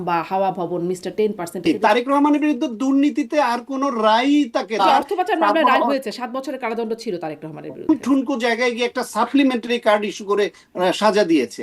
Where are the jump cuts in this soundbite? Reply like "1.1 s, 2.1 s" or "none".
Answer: 1.6 s, 4.8 s, 7.9 s